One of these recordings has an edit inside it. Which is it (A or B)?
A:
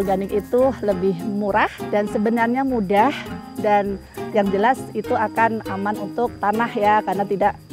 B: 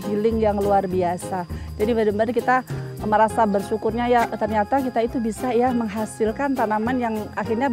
A